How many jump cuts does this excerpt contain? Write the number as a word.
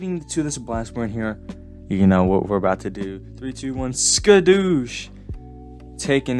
zero